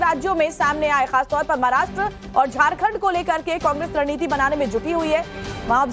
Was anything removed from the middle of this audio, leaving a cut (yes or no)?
yes